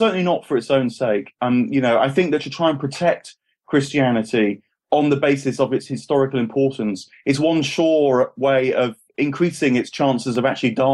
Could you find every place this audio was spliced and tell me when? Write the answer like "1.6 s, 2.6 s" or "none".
none